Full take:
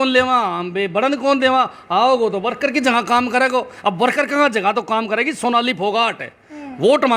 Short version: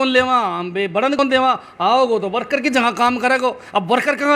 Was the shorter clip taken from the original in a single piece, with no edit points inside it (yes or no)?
no